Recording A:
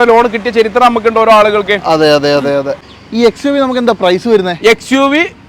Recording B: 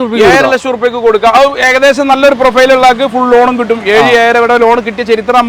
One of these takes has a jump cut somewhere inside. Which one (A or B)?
A